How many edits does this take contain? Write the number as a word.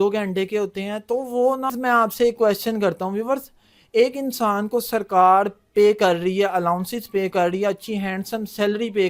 one